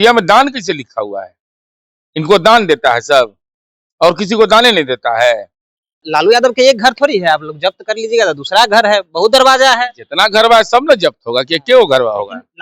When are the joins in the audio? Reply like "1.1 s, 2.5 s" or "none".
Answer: 6.0 s